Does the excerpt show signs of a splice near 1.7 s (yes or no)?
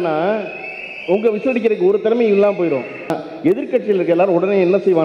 no